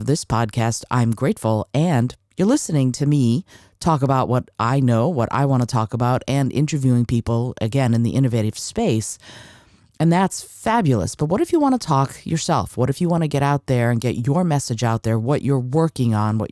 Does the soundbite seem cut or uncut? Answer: uncut